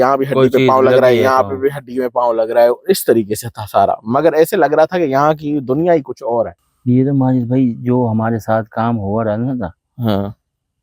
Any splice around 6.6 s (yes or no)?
yes